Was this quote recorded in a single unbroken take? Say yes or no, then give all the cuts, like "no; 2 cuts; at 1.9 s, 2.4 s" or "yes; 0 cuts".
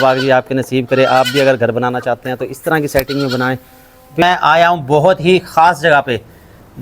no; 1 cut; at 4.2 s